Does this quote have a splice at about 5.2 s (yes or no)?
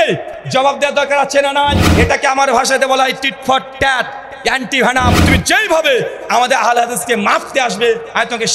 yes